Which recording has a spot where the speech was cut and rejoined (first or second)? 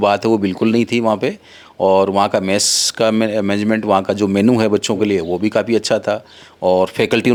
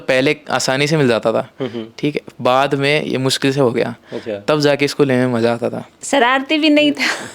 second